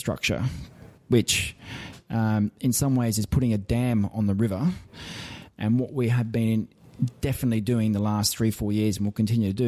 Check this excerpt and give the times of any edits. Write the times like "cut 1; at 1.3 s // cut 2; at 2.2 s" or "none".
none